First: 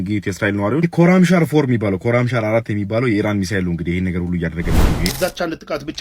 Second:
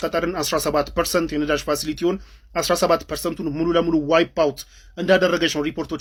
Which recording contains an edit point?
first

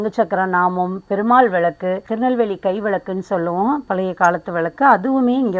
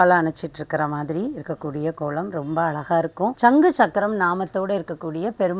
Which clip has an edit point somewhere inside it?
first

